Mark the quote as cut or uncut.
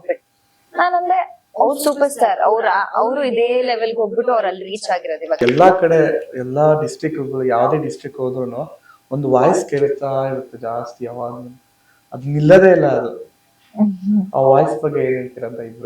cut